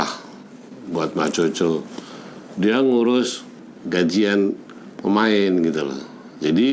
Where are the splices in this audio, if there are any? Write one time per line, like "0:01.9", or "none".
0:03.7